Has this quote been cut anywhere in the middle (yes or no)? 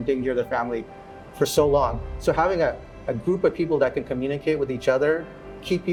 no